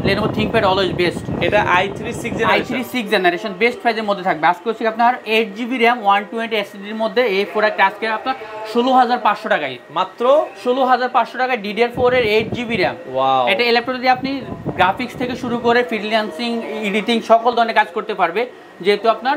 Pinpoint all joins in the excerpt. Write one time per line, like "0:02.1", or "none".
none